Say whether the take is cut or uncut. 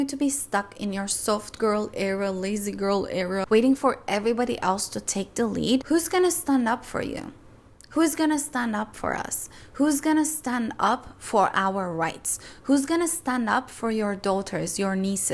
cut